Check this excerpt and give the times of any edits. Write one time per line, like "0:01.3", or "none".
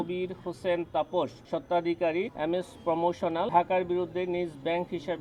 0:01.4
0:02.3
0:03.5